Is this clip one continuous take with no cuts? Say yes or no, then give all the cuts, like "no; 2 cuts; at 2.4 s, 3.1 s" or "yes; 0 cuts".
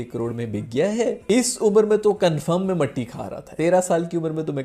yes; 0 cuts